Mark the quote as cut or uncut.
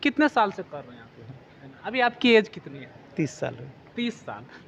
cut